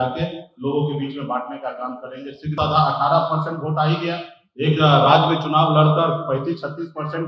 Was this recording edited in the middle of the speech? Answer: yes; 1 cut; at 2.6 s

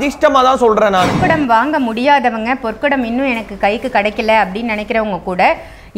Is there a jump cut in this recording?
yes; 1 cut; at 1.2 s

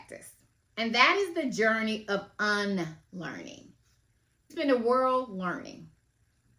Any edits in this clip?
yes; 1 cut; at 4.5 s

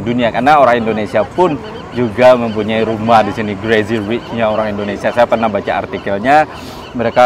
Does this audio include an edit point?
no; 0 cuts

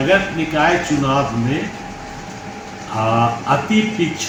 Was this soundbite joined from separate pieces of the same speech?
no; 0 cuts

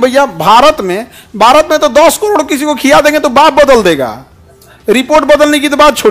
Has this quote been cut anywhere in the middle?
no; 0 cuts

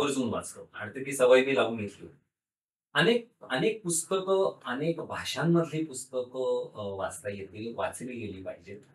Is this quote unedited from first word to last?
yes; 0 cuts

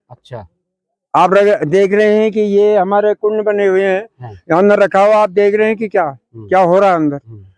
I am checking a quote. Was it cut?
no; 0 cuts

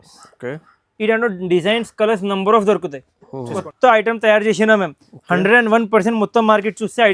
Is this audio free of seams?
no; 1 cut; at 3.6 s

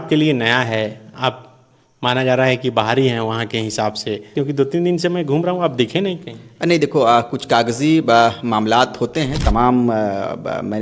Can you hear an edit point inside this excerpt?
yes; 2 cuts; at 4.3 s, 9.4 s

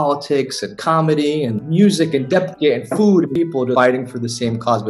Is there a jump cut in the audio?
yes; 2 cuts; at 1.5 s, 3.4 s

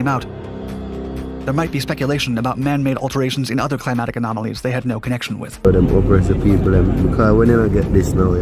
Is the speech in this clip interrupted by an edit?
yes; 1 cut; at 5.6 s

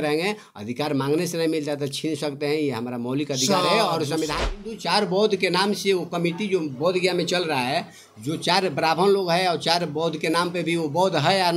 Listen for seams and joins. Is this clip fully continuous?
no; 1 cut; at 4.6 s

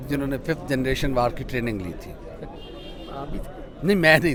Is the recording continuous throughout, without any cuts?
yes; 0 cuts

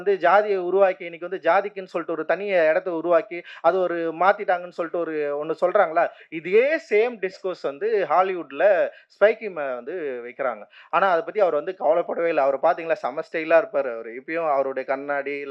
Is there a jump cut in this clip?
no; 0 cuts

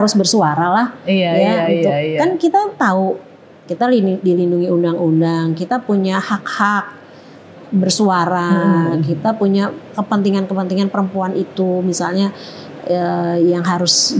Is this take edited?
no; 0 cuts

